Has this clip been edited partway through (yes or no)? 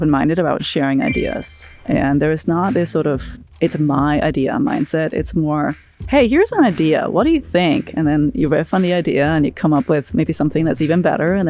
no